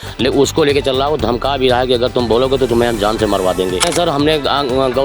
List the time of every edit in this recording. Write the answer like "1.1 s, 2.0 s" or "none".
3.9 s